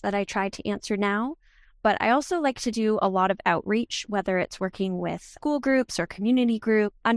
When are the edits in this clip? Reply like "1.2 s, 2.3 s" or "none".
none